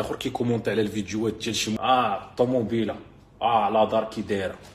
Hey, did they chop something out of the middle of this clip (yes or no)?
yes